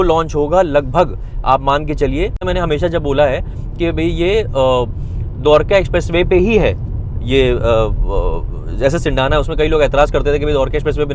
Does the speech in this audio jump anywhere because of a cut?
yes; 1 cut; at 2.5 s

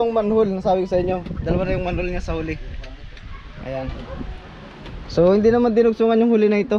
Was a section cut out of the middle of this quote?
no; 0 cuts

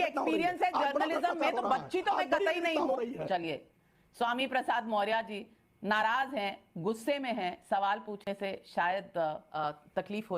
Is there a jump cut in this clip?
yes; 2 cuts; at 3.2 s, 9.5 s

